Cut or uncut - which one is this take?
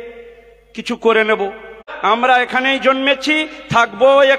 cut